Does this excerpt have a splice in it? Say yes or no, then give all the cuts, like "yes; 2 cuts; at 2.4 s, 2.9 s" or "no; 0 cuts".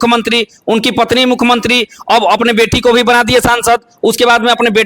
no; 0 cuts